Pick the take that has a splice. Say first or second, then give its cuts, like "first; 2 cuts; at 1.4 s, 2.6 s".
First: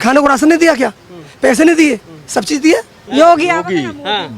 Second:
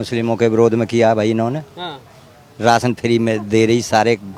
first; 1 cut; at 3.0 s